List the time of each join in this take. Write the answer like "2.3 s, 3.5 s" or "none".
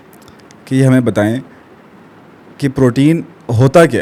none